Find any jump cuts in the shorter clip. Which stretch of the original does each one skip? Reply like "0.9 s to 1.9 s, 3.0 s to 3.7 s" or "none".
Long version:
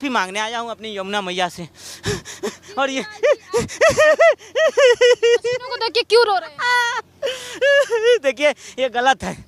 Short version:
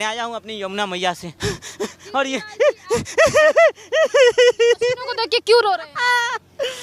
1.6 s to 1.9 s